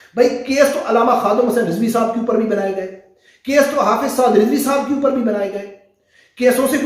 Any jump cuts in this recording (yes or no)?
no